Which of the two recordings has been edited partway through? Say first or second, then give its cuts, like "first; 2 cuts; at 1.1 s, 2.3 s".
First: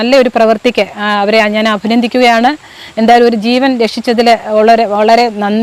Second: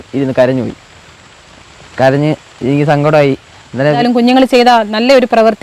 second; 1 cut; at 4.0 s